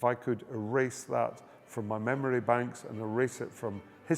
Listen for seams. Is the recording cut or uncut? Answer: uncut